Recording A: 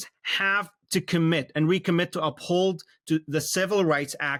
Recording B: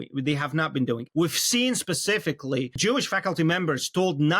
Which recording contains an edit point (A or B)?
B